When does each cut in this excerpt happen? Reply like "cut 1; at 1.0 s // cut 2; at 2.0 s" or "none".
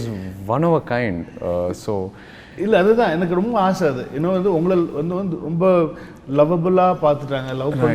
none